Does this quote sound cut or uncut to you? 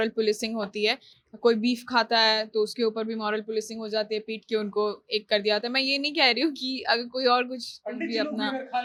uncut